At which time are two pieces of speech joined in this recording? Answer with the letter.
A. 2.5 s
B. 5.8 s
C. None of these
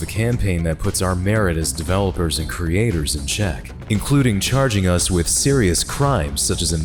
C